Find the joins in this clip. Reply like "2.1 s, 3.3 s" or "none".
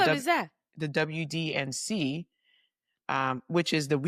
none